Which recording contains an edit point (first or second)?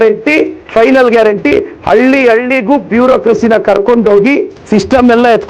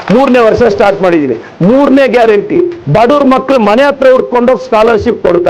first